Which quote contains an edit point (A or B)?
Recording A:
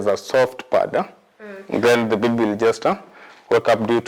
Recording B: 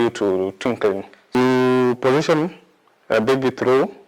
B